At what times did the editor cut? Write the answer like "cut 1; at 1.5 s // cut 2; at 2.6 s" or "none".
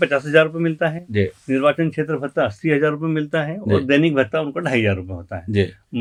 none